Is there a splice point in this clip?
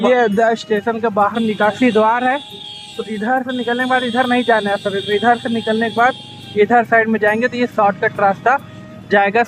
no; 0 cuts

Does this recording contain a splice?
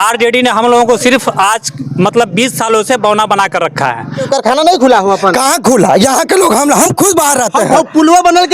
yes; 1 cut; at 4.1 s

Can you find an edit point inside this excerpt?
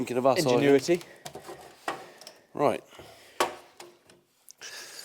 no; 0 cuts

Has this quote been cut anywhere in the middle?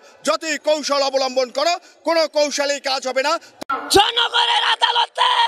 yes; 1 cut; at 3.5 s

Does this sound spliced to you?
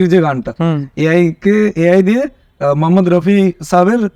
no; 0 cuts

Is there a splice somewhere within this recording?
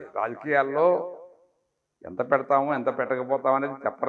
no; 0 cuts

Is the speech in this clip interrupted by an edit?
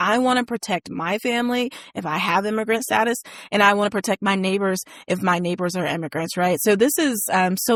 no; 0 cuts

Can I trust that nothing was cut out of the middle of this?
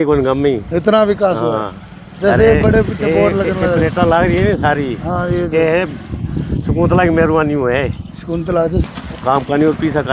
yes; 0 cuts

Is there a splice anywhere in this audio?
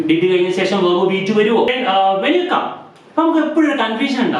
yes; 1 cut; at 1.7 s

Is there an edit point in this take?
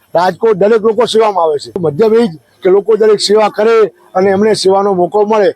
yes; 1 cut; at 1.8 s

